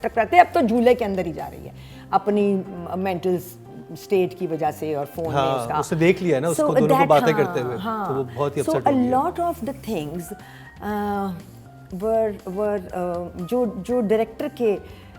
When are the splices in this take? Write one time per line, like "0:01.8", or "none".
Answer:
none